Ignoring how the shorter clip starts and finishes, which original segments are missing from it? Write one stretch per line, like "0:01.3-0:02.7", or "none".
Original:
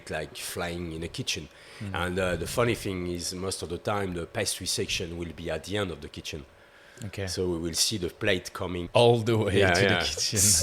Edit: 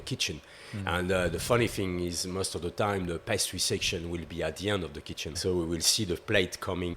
0:06.5-0:07.3

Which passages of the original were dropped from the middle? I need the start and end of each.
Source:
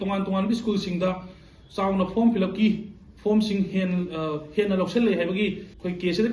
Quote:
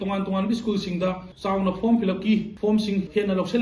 0:01.3-0:01.6
0:03.2-0:04.3

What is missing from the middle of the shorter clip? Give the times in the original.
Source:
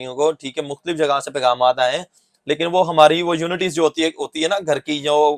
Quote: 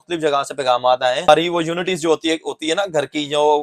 0:02.1-0:03.0

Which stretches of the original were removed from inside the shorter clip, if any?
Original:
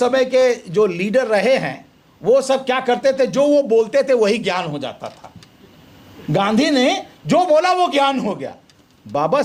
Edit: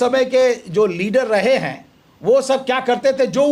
none

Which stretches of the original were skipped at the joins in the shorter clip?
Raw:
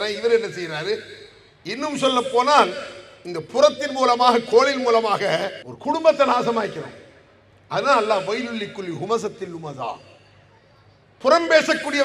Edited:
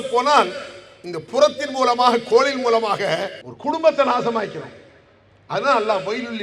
none

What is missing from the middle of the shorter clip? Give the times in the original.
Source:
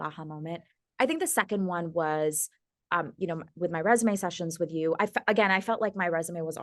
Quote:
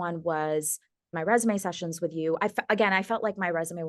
0:02.8-0:03.7

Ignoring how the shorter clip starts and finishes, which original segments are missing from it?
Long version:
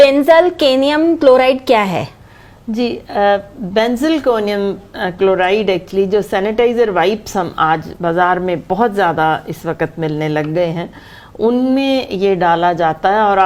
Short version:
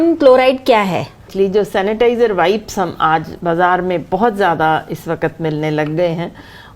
0:02.3-0:05.9

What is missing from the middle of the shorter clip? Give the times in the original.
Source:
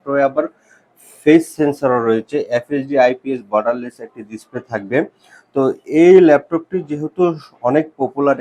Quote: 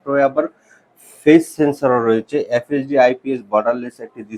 none

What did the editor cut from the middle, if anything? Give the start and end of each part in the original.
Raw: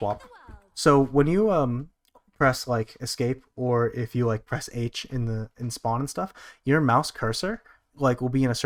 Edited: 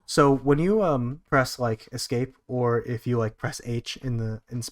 0:01.9-0:02.3

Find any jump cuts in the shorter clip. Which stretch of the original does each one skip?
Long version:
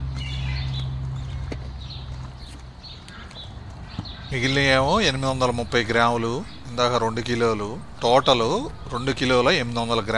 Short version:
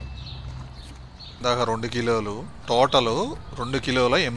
0:02.9-0:06.6

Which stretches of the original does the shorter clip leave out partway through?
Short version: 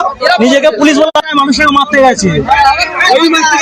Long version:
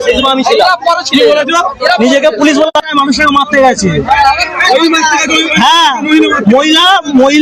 none

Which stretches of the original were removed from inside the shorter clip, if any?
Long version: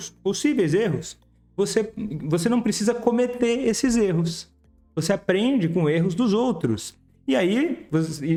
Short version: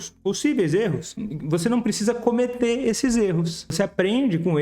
0:01.2-0:02.1
0:04.4-0:04.9

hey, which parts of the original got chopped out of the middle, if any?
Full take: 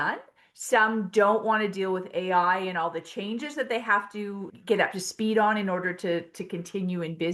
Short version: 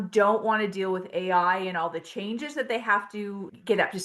none

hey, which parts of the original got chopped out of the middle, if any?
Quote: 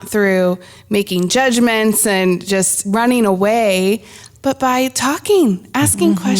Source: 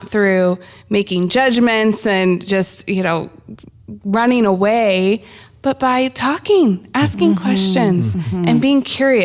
0:02.8-0:04.0

